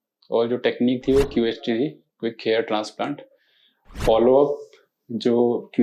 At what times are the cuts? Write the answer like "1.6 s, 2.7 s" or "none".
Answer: 3.9 s